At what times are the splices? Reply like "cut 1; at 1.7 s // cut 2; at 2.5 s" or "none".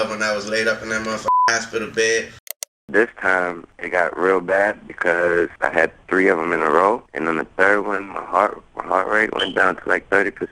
cut 1; at 2.7 s